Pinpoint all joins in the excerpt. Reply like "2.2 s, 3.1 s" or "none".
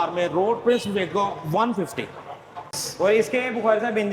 2.8 s